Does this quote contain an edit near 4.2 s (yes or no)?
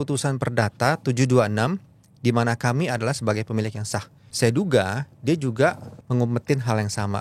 yes